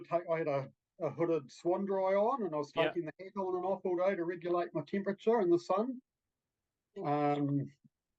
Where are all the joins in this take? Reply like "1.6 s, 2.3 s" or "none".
none